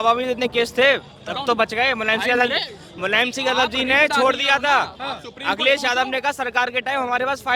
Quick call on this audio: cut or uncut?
uncut